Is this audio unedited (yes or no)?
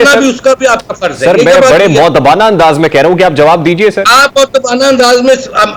yes